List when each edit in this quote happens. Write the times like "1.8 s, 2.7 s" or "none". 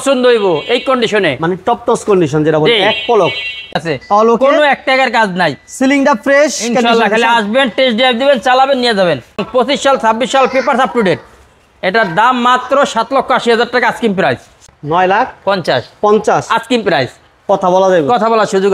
3.7 s, 9.4 s, 14.5 s